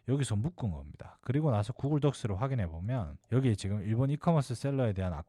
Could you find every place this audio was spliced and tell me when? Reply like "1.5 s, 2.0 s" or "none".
3.2 s